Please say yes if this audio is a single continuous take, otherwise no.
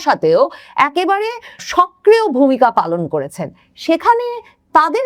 no